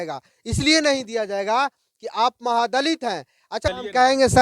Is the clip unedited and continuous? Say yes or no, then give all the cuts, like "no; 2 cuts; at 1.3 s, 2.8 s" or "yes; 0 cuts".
no; 1 cut; at 3.3 s